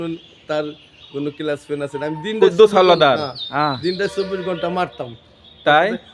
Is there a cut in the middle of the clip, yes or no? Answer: no